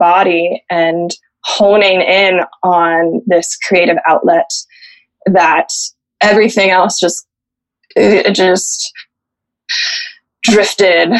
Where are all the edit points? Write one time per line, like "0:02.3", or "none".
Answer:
none